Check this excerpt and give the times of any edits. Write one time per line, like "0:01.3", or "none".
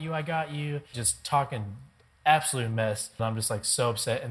0:01.0
0:03.2

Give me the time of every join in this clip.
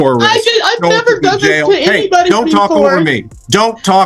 none

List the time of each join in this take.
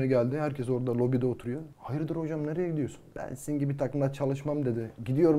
0:01.7
0:03.1

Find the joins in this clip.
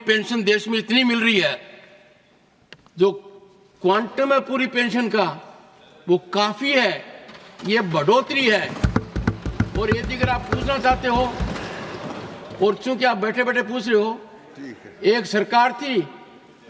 none

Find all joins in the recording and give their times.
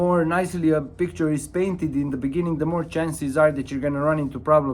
none

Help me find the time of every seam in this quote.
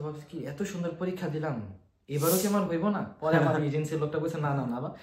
none

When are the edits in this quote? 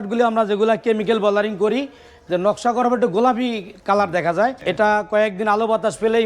0:04.6

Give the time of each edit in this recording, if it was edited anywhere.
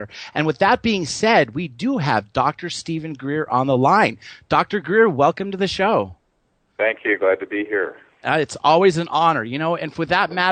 none

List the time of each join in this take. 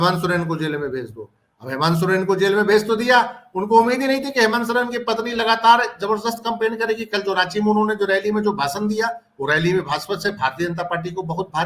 none

